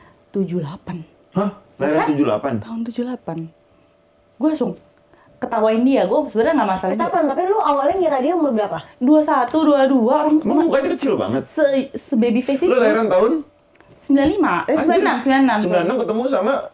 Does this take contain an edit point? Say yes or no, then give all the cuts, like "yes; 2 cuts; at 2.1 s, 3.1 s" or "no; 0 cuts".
no; 0 cuts